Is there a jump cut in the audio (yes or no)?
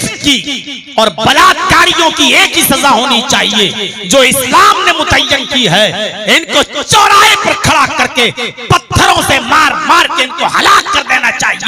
no